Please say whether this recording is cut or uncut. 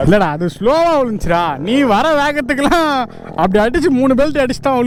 uncut